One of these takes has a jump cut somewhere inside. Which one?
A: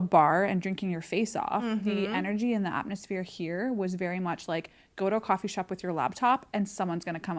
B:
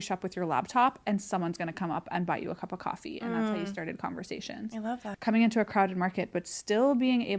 B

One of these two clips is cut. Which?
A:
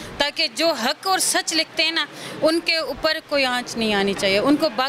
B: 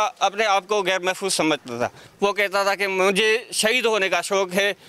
B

